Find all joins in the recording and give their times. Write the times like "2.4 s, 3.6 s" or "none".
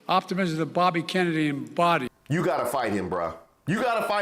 2.2 s